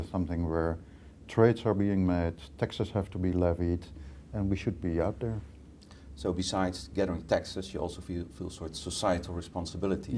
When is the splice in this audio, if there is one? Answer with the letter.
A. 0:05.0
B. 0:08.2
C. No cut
B